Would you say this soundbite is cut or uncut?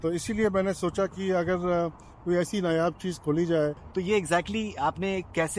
cut